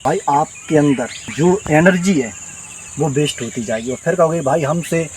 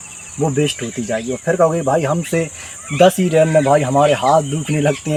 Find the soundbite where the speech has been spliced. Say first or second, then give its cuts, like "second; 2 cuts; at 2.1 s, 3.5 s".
first; 1 cut; at 1.2 s